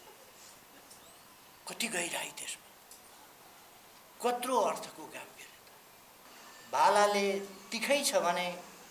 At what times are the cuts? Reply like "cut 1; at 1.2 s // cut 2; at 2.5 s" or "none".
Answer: cut 1; at 6.2 s